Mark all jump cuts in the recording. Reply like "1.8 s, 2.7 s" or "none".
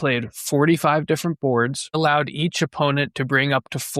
2.0 s